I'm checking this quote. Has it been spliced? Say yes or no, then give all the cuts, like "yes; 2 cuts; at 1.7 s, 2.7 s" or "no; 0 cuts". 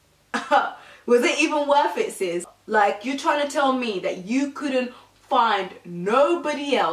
yes; 1 cut; at 2.4 s